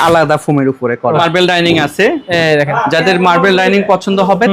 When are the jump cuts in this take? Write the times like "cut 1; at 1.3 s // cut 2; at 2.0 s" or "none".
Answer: cut 1; at 1.2 s